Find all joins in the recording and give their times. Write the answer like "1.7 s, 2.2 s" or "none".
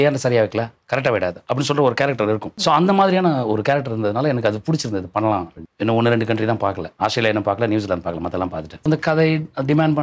2.5 s, 5.6 s, 6.9 s, 8.8 s